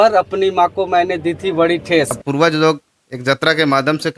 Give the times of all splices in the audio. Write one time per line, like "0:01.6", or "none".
0:02.2